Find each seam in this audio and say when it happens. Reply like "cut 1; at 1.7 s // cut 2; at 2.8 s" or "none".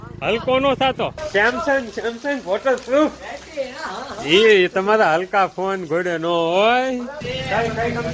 cut 1; at 1.2 s // cut 2; at 7.2 s